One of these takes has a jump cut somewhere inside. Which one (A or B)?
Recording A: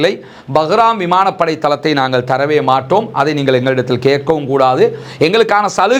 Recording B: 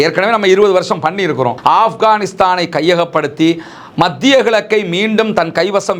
B